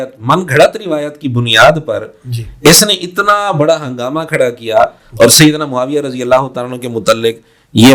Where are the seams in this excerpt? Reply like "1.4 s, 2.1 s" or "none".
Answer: none